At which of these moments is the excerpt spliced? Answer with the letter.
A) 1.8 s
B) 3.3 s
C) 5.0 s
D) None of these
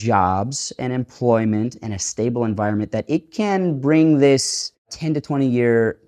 C